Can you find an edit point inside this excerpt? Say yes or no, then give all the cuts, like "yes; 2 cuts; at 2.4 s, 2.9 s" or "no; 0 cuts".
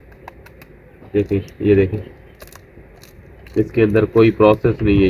no; 0 cuts